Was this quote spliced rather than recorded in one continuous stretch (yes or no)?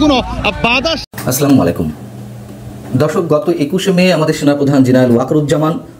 yes